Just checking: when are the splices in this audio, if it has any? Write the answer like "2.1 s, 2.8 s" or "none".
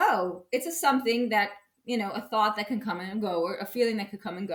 none